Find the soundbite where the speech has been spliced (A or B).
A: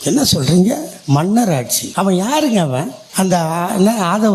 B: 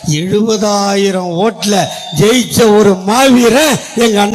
A